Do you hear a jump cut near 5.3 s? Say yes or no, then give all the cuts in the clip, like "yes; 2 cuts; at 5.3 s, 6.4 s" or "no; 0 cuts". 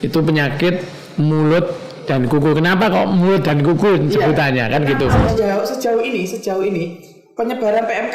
yes; 1 cut; at 5.3 s